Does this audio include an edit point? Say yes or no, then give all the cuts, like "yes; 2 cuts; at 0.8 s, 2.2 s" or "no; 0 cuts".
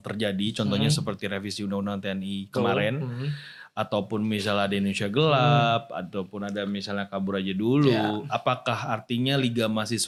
no; 0 cuts